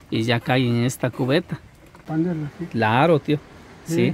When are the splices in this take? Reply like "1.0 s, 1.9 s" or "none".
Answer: 2.1 s